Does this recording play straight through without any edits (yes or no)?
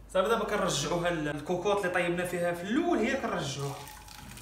no